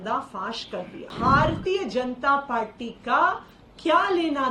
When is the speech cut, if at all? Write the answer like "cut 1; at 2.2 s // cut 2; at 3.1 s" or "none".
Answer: cut 1; at 1.1 s